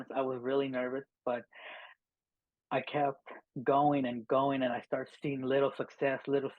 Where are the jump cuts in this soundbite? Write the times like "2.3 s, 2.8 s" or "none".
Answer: none